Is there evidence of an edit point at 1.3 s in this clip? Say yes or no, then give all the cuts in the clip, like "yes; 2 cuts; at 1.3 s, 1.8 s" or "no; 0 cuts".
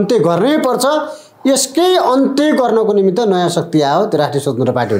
no; 0 cuts